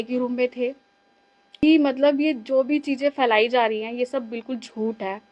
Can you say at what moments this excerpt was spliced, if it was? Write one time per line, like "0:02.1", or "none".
0:01.6